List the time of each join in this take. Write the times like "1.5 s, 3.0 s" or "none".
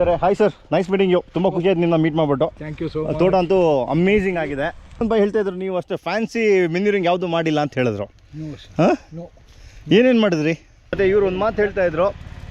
5.0 s, 11.0 s

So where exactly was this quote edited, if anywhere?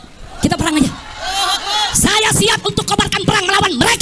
none

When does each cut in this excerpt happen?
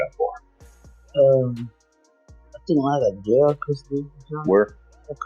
none

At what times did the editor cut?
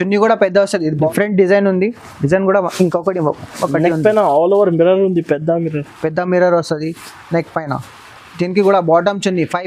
1.1 s

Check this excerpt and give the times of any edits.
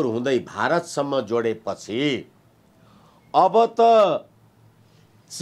none

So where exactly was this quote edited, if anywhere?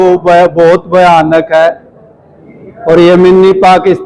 none

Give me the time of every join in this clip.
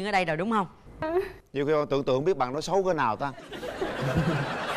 1.0 s

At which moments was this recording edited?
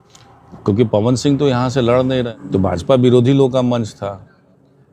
2.4 s

